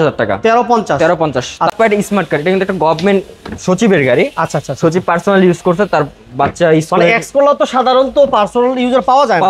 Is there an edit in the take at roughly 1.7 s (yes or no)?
yes